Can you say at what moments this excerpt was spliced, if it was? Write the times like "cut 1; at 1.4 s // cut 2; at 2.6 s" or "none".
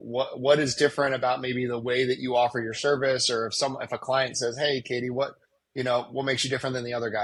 none